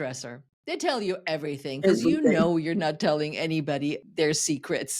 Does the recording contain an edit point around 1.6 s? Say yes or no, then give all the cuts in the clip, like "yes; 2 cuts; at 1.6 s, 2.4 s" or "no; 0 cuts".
no; 1 cut; at 4.0 s